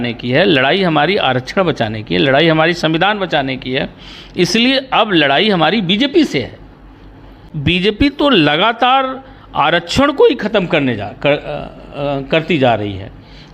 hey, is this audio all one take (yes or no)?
no